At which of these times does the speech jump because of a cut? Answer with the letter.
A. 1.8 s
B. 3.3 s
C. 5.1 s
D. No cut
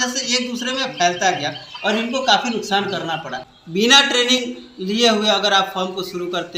B